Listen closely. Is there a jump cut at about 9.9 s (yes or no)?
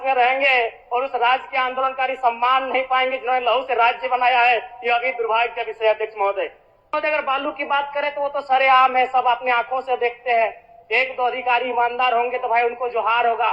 no